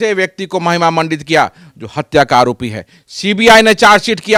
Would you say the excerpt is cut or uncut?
uncut